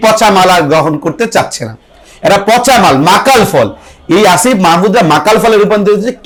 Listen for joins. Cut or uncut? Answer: uncut